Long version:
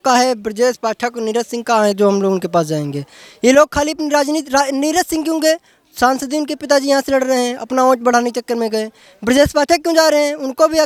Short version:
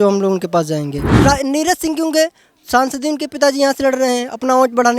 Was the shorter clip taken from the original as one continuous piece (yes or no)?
no